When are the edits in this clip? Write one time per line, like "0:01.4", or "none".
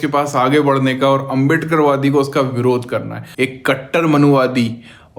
0:03.2